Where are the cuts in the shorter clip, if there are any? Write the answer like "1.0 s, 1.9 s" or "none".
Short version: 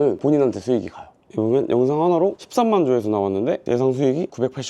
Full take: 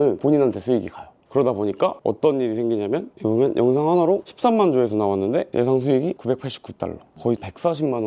1.2 s